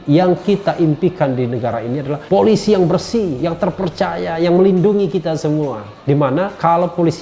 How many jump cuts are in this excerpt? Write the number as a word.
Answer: two